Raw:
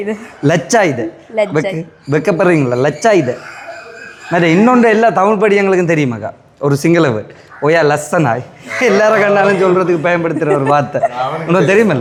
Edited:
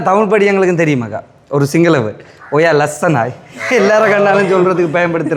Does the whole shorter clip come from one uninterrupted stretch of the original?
yes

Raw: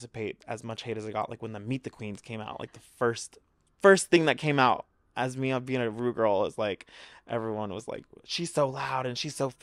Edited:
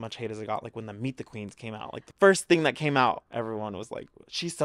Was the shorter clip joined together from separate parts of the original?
yes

